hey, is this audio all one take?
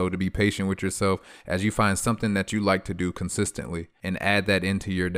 no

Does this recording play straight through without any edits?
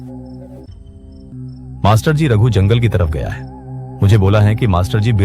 no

